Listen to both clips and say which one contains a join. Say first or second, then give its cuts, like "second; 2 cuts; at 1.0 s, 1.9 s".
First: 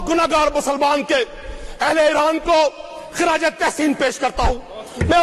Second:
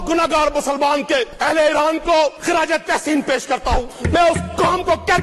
second; 3 cuts; at 1.3 s, 2.4 s, 3.9 s